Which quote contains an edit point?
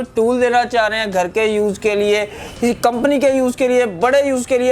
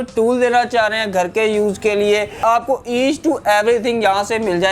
second; 1 cut; at 2.4 s

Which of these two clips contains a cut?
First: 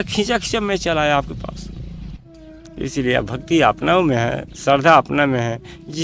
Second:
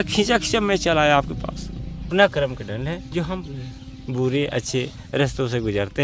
second; 1 cut; at 2.1 s

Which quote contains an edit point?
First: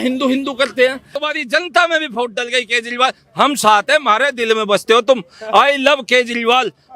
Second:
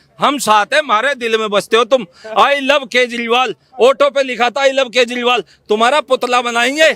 first; 1 cut; at 1.1 s

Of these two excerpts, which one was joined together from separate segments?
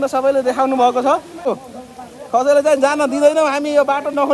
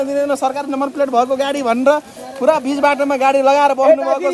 first; 1 cut; at 1.5 s

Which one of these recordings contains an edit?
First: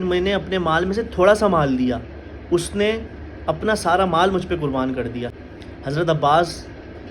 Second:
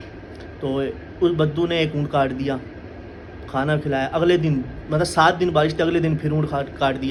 first; 1 cut; at 5.4 s

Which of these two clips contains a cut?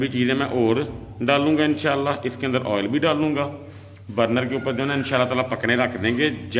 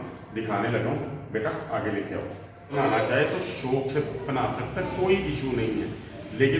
second; 1 cut; at 2.7 s

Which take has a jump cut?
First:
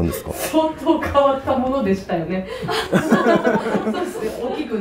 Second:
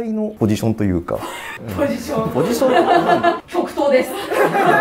second; 1 cut; at 3.4 s

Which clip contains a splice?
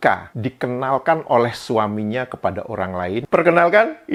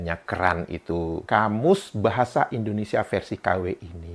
second; 1 cut; at 1.2 s

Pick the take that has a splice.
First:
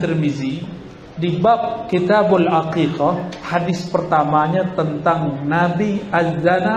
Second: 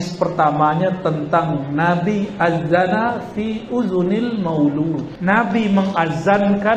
second; 1 cut; at 5.1 s

